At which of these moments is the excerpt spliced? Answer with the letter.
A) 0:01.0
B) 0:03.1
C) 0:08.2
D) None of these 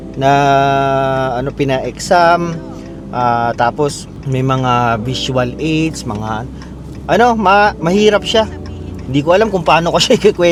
D